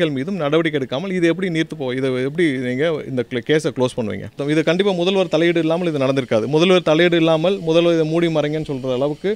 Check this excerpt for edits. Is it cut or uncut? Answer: cut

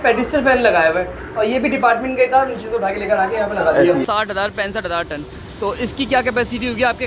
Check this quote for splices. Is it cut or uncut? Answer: cut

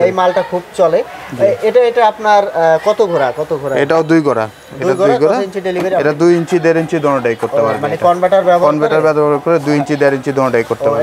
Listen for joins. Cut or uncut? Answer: uncut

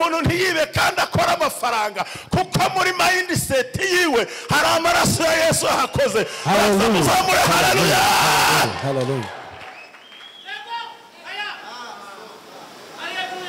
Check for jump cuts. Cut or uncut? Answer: uncut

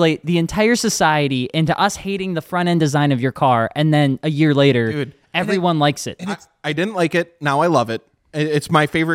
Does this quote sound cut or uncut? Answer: uncut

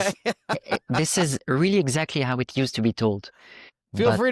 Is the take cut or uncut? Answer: uncut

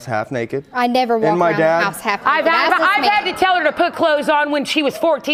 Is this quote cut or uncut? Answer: uncut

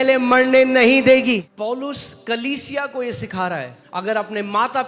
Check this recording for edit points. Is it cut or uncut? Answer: cut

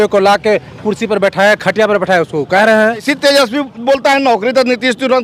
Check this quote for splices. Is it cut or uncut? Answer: cut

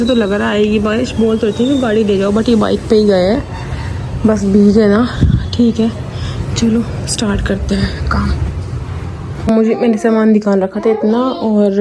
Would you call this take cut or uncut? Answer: uncut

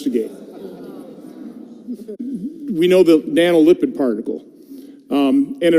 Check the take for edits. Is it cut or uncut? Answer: uncut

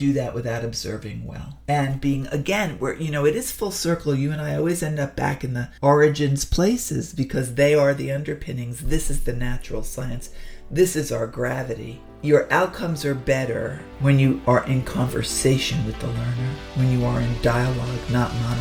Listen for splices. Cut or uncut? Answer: uncut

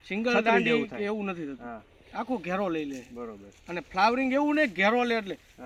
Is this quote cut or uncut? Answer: uncut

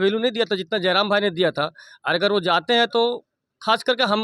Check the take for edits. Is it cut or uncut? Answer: uncut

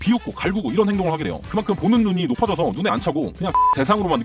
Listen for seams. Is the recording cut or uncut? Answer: cut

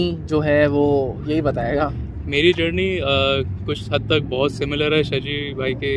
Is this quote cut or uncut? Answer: uncut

